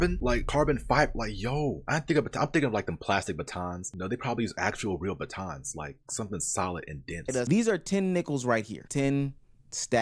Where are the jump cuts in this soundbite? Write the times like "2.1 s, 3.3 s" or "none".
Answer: 7.5 s